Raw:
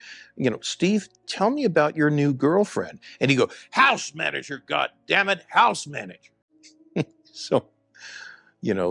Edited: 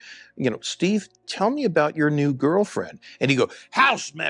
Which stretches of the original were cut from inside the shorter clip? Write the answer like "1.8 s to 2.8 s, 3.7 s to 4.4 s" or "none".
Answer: none